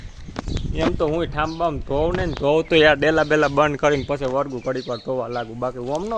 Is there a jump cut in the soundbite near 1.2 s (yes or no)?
no